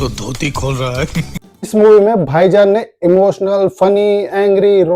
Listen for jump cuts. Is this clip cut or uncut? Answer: cut